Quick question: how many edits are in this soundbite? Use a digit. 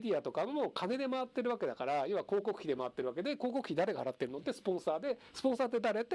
0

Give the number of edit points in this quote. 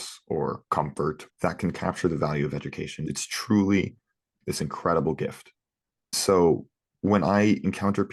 2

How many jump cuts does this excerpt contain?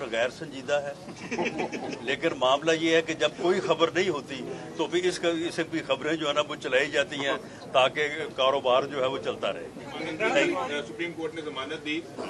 1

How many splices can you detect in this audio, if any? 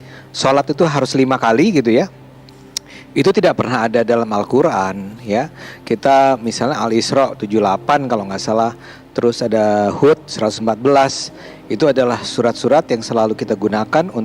0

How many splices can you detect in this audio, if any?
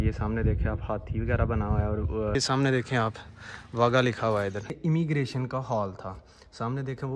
2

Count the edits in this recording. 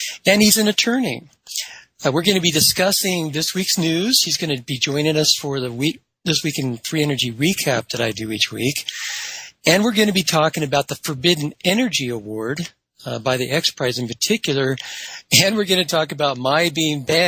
1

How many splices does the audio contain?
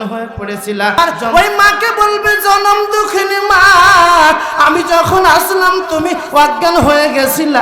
1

